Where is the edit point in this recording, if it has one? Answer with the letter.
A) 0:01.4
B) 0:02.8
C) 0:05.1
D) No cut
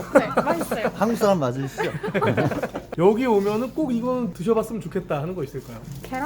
B